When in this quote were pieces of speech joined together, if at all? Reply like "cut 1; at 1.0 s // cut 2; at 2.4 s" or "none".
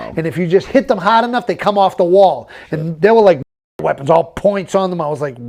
none